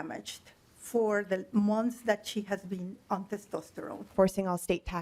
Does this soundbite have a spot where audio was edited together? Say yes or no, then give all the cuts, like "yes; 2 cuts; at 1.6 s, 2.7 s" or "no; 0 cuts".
yes; 1 cut; at 4.1 s